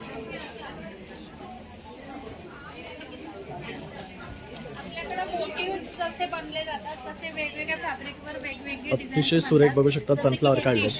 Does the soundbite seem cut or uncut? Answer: uncut